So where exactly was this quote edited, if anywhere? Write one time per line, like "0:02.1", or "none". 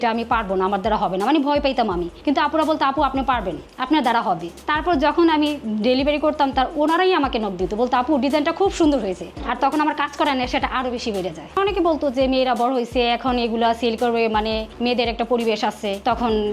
0:04.6
0:09.3
0:11.5